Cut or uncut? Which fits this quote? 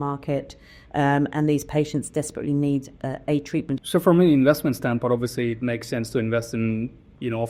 cut